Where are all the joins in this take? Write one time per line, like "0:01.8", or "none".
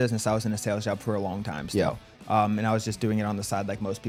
none